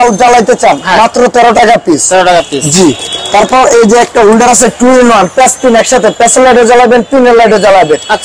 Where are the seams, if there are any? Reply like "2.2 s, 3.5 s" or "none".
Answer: none